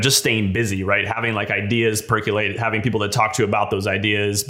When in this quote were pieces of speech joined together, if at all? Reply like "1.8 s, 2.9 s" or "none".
none